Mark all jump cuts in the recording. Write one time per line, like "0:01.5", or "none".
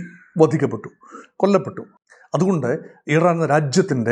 0:01.8